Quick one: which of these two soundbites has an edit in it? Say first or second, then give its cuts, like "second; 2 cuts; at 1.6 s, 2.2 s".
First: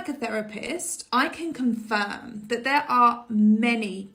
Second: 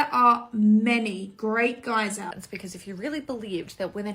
second; 1 cut; at 2.4 s